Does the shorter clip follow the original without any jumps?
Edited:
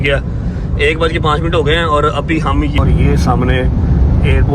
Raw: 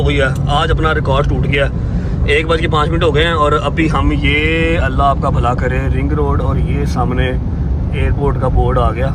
no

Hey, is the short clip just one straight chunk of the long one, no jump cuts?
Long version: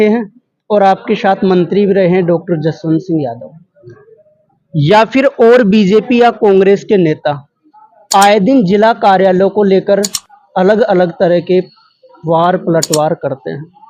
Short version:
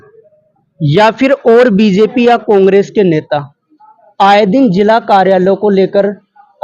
yes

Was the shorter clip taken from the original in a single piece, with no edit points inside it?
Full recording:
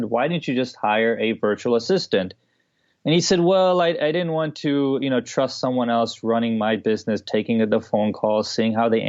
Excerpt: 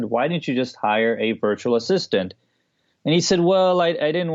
yes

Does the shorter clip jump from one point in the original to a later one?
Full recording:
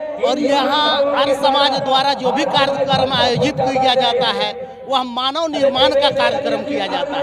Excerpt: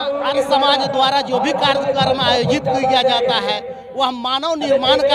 no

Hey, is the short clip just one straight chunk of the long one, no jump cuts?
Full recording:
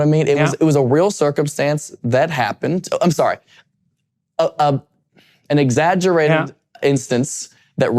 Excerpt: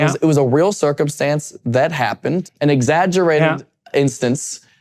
no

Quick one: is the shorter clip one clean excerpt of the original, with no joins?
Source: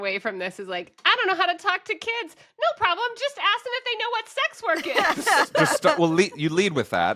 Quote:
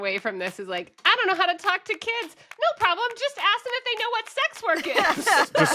yes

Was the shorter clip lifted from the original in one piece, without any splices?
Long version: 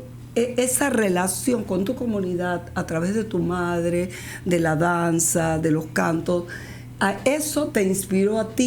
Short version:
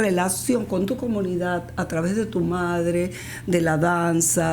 yes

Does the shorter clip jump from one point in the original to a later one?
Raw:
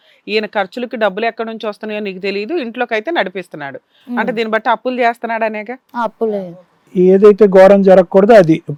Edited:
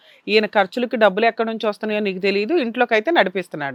no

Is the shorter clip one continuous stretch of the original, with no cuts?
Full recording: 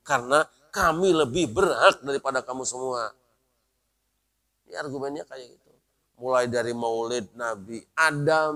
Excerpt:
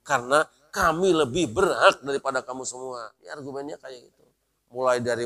no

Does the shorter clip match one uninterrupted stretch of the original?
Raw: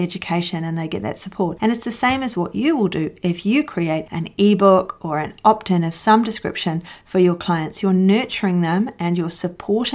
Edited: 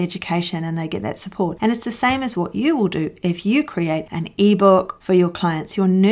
no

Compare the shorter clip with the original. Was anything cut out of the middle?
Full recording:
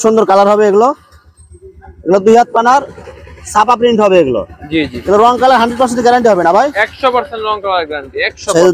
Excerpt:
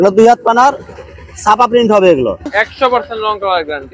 yes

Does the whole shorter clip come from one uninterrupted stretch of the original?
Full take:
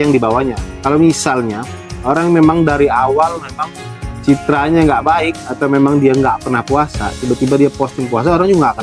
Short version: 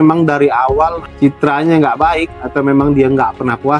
no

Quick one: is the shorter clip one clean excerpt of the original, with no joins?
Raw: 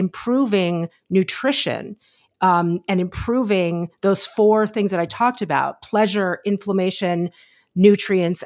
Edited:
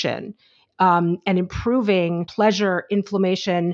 no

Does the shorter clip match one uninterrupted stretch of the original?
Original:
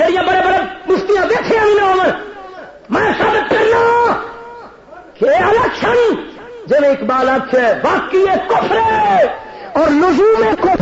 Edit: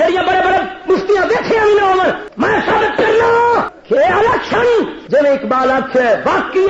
no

